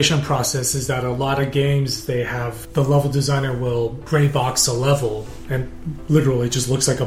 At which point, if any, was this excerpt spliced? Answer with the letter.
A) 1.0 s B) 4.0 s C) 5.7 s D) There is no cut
B